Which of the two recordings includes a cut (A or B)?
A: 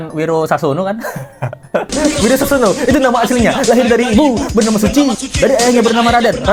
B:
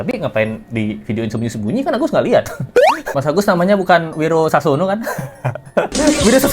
B